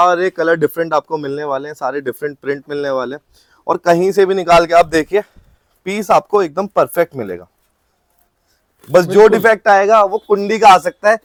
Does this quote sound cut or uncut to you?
uncut